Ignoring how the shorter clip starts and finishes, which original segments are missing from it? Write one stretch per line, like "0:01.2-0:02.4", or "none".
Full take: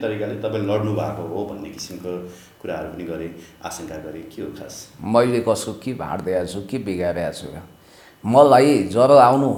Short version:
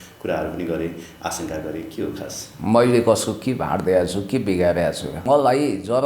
0:07.5-0:08.2